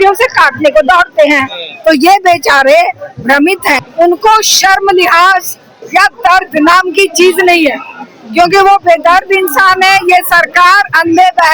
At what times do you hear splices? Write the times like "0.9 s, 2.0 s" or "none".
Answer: 3.8 s